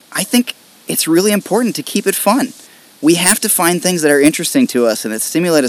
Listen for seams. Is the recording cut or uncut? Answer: uncut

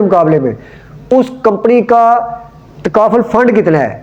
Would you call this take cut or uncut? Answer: uncut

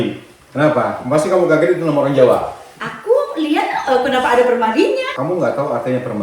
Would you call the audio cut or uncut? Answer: cut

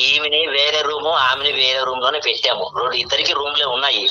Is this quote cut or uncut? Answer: uncut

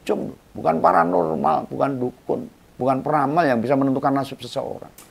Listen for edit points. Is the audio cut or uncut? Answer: uncut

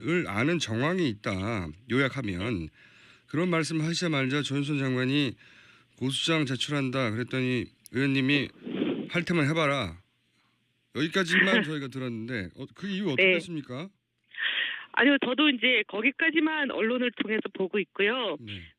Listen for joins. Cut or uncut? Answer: uncut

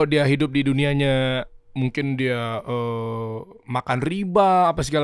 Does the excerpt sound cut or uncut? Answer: uncut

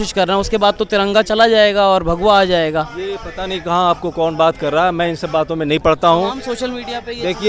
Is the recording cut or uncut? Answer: uncut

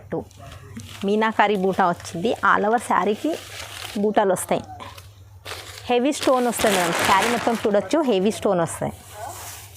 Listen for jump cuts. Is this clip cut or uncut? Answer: uncut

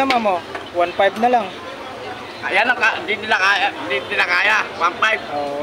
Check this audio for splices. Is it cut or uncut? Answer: uncut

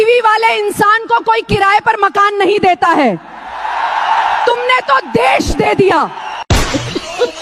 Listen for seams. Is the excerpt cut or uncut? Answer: uncut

